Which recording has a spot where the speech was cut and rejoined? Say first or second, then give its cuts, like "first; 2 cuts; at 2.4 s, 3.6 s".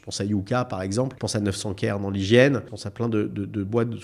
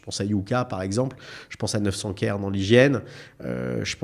first; 2 cuts; at 1.2 s, 2.8 s